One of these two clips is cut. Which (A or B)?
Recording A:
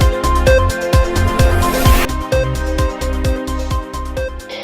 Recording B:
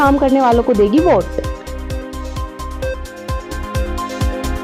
A